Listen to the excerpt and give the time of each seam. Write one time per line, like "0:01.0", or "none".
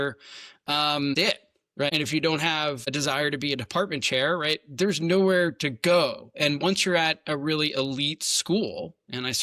0:01.9
0:02.9

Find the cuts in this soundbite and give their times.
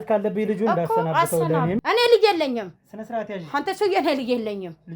0:01.8

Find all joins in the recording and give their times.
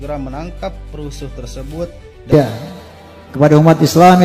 0:02.3

